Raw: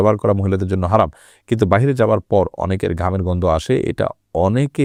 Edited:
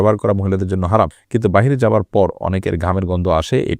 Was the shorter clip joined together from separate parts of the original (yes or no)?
yes